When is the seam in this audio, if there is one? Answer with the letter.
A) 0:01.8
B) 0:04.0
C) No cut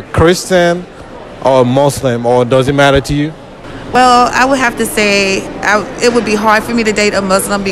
B